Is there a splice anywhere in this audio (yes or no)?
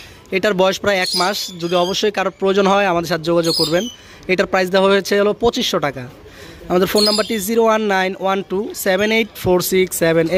no